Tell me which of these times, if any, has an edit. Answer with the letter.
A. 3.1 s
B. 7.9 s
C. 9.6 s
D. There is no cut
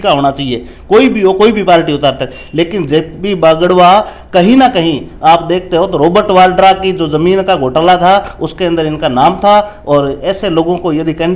D